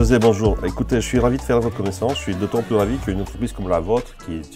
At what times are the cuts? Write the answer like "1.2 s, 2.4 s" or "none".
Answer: none